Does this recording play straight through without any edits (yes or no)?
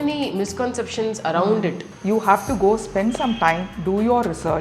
no